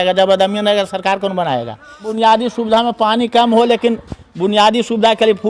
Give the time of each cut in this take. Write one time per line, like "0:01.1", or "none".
0:02.1